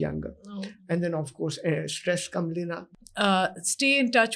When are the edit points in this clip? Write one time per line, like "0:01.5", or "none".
0:02.8